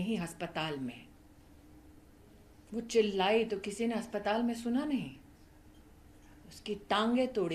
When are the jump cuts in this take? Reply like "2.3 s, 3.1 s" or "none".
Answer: none